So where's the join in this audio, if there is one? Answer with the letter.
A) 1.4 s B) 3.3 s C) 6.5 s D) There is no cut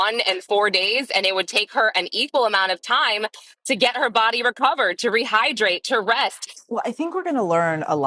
C